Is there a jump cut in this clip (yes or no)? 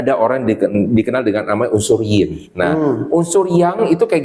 no